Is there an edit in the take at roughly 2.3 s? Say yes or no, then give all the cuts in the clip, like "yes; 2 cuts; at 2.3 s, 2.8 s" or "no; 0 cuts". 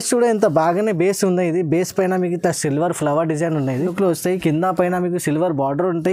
no; 1 cut; at 3.8 s